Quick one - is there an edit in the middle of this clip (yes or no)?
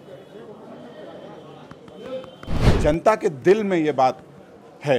yes